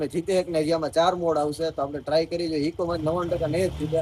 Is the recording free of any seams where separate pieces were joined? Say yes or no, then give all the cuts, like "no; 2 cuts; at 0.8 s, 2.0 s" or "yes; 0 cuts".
yes; 0 cuts